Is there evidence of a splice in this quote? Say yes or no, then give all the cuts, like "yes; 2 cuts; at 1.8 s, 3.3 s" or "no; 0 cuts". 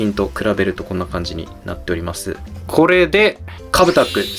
yes; 1 cut; at 2.5 s